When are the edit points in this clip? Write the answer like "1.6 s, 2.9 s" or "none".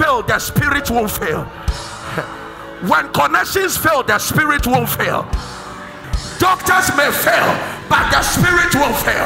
6.0 s